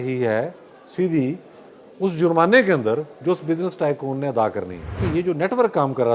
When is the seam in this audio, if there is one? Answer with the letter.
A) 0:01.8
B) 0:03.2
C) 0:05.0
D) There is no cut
C